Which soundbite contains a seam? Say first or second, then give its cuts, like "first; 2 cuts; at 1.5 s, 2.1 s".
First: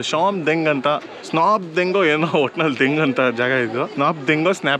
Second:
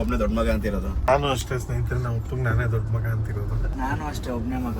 second; 2 cuts; at 1.1 s, 3.7 s